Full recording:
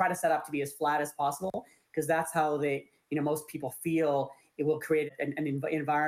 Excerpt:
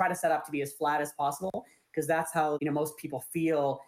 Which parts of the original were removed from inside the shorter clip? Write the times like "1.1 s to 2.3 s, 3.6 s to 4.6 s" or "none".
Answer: 2.6 s to 3.1 s